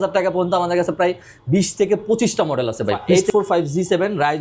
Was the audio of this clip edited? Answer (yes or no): yes